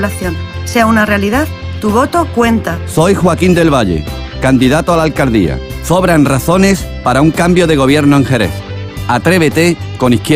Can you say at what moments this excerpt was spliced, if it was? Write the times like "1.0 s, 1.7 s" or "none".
none